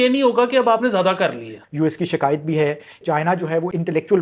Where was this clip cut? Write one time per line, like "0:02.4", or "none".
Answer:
0:01.6
0:03.2

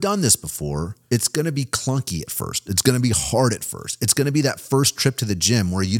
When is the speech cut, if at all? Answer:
0:00.9

